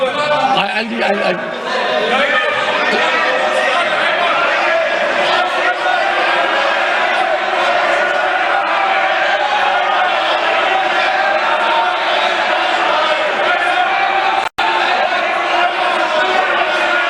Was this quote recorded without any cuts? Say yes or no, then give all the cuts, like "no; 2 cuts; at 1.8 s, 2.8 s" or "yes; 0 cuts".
yes; 0 cuts